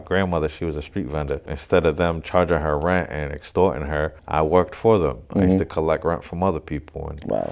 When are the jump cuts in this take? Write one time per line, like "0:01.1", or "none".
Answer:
0:01.5
0:04.2

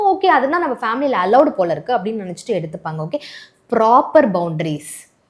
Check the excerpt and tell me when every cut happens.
none

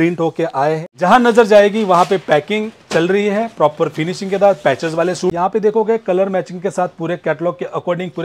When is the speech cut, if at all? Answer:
0:00.9
0:05.3

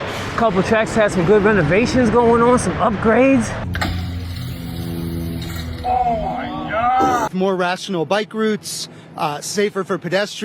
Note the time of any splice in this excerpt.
0:03.6
0:07.3

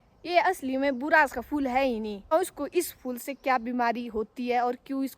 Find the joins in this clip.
0:02.3

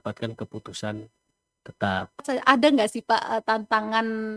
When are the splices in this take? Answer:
0:02.2

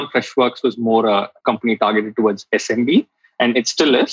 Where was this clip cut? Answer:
0:01.3

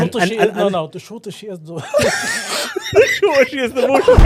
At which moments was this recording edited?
none

